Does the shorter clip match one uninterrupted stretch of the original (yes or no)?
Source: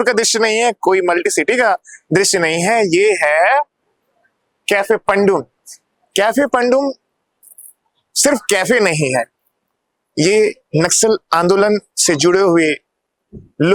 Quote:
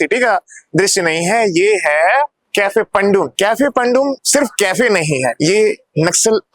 no